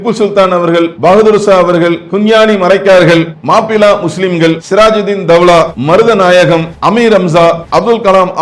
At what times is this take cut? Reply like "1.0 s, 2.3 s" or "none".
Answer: 0.9 s, 2.0 s, 3.4 s, 4.6 s, 5.8 s, 6.7 s, 7.6 s